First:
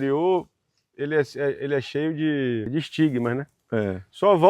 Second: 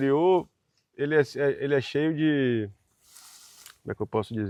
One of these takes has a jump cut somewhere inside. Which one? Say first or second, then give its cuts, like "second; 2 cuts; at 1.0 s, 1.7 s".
first; 1 cut; at 2.7 s